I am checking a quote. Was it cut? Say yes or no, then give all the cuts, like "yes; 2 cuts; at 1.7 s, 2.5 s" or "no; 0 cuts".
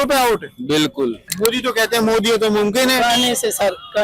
yes; 1 cut; at 1.2 s